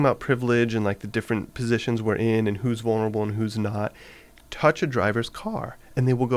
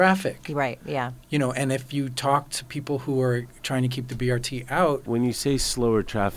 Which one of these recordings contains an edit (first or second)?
second